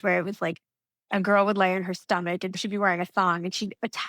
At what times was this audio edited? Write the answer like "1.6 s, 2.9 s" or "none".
2.6 s